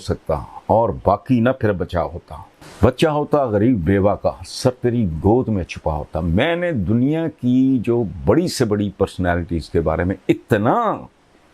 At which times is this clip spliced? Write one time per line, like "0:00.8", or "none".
none